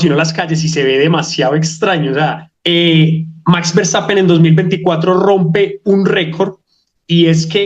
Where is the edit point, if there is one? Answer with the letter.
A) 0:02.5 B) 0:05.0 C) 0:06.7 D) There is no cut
A